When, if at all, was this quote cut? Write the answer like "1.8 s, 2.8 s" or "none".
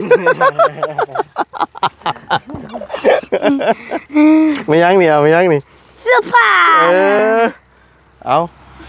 none